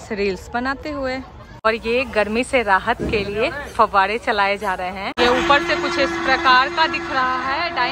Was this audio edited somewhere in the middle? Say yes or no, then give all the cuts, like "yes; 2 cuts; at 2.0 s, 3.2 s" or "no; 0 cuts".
yes; 2 cuts; at 1.7 s, 5.2 s